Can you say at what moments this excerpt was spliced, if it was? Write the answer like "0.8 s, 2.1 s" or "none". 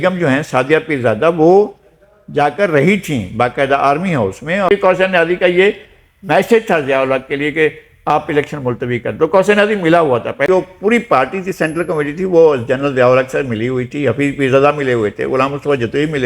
4.7 s, 10.5 s

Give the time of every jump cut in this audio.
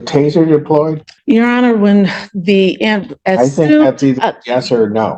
1.1 s

